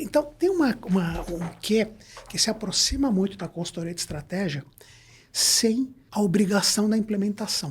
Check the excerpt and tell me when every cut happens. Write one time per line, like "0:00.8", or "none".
0:06.0